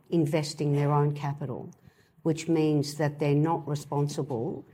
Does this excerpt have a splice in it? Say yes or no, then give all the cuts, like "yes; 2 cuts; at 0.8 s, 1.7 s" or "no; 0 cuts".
no; 0 cuts